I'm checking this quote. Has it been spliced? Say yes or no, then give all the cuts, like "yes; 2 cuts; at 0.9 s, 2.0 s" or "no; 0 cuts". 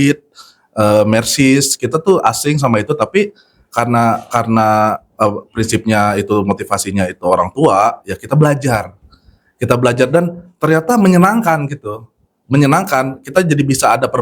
no; 0 cuts